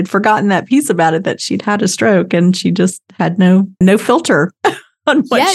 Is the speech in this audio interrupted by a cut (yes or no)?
yes